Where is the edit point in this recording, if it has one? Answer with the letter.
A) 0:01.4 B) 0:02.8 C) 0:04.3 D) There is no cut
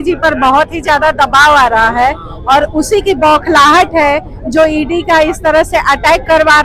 D